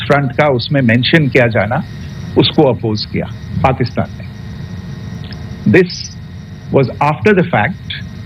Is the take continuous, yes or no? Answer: yes